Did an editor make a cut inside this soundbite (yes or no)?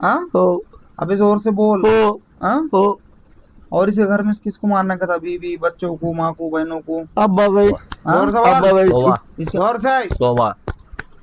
yes